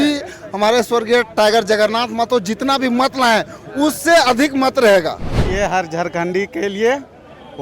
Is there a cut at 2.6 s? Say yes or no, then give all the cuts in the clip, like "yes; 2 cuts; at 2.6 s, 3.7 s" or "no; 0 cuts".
no; 1 cut; at 5.4 s